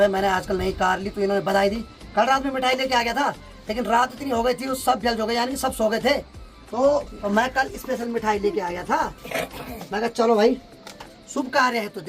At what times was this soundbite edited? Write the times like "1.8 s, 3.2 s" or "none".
none